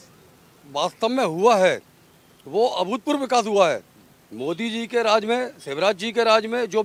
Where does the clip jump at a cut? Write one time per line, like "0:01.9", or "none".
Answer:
none